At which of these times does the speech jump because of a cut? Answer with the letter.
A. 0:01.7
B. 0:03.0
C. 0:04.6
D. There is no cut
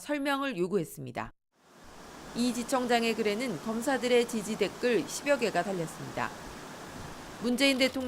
B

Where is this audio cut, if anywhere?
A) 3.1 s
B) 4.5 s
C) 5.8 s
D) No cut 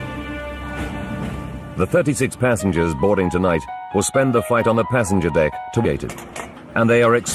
D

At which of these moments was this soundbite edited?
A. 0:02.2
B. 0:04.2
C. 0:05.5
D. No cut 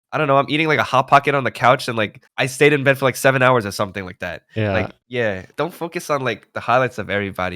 C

